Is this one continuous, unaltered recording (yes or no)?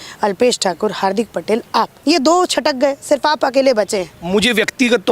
no